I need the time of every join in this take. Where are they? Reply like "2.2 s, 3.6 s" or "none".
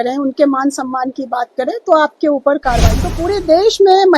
3.2 s

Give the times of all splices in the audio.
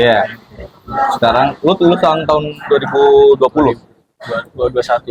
none

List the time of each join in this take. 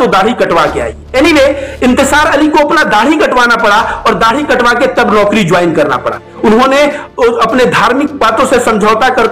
0.9 s, 6.3 s

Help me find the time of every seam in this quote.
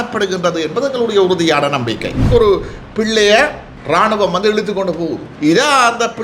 2.2 s, 3.7 s, 5.3 s

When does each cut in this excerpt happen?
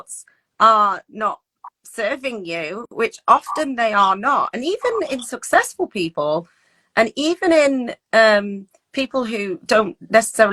none

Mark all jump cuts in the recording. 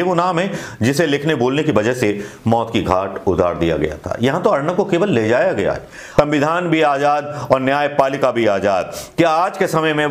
6.0 s

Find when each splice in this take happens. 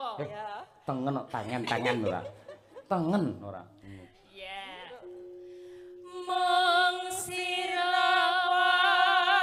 none

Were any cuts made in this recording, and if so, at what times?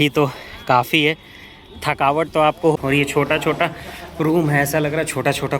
2.7 s

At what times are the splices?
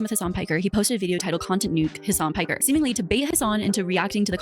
3.3 s

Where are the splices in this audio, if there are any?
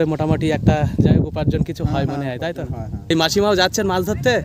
3.1 s

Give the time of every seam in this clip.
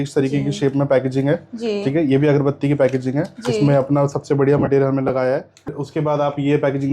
5.8 s

